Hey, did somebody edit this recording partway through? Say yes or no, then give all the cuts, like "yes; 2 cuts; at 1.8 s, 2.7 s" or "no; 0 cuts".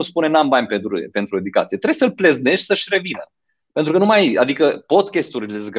no; 0 cuts